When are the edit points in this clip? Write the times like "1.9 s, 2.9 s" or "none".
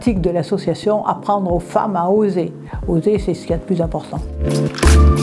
4.3 s

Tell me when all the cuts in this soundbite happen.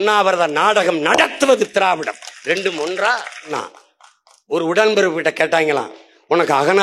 3.5 s

